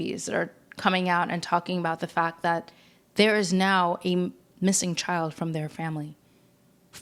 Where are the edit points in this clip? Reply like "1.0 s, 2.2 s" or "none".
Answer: none